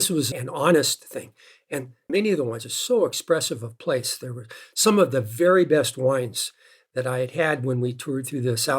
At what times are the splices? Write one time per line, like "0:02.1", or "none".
none